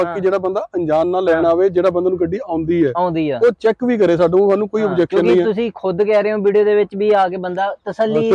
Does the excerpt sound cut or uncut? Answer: uncut